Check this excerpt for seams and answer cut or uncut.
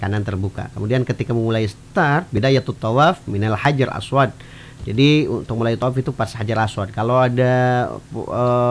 uncut